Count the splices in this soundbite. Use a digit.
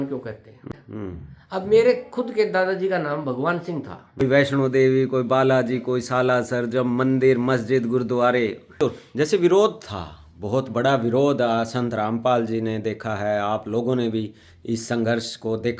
3